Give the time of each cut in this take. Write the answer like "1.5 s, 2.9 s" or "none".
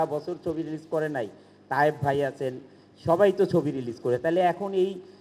none